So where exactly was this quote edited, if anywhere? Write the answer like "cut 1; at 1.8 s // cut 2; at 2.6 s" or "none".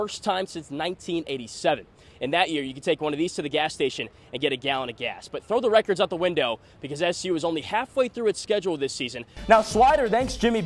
cut 1; at 9.3 s